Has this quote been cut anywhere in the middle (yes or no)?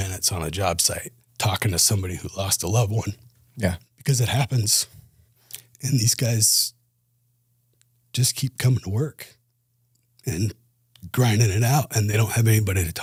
no